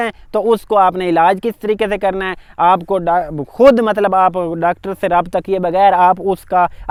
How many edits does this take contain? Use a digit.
0